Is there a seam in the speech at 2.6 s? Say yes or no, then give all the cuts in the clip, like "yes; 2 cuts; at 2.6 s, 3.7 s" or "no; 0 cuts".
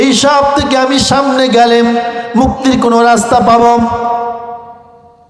no; 0 cuts